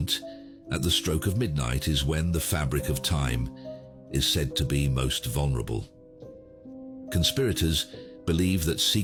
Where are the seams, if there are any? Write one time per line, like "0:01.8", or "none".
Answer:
none